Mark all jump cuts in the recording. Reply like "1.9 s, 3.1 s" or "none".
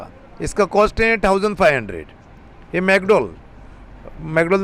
none